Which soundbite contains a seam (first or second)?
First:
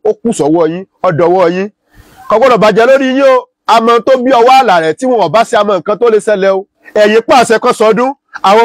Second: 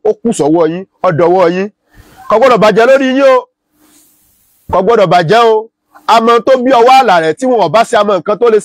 first